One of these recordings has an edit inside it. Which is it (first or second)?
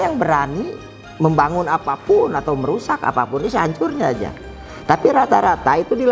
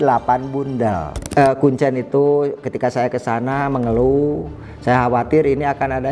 second